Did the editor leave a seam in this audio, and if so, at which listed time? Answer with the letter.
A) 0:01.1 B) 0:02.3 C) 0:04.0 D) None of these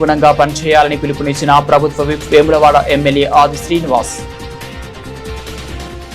C